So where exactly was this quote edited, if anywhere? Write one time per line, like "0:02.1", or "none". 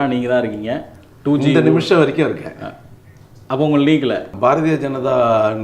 0:04.3